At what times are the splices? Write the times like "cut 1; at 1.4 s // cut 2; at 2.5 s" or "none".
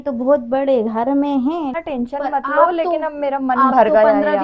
cut 1; at 1.7 s